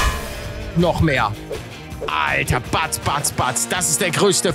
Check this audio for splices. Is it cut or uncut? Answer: uncut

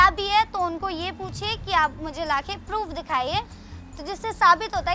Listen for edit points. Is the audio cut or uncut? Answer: uncut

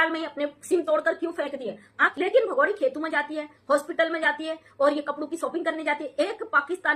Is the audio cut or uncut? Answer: cut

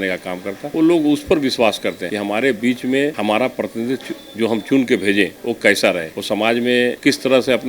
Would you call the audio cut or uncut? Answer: uncut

